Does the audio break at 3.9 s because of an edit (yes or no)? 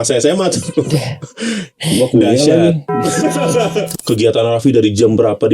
yes